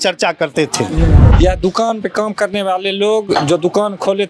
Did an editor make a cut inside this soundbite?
yes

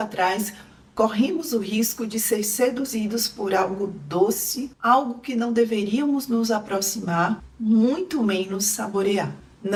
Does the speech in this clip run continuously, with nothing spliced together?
yes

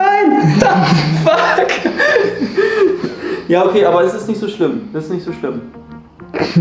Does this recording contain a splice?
no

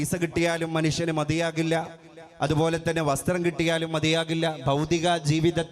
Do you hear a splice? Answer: no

